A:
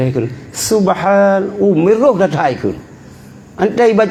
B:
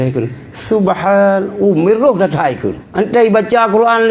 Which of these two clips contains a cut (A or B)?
B